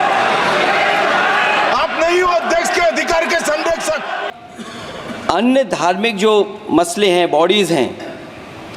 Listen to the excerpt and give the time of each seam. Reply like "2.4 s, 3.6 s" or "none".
4.2 s